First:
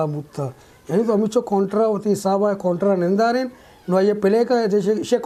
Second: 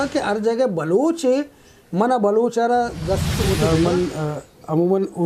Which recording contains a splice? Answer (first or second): second